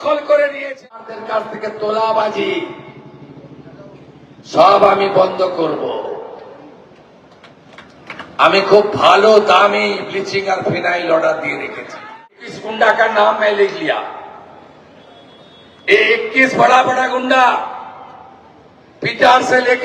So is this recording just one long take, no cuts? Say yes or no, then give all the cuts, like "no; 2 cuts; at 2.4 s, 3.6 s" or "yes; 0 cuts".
no; 2 cuts; at 1.0 s, 12.2 s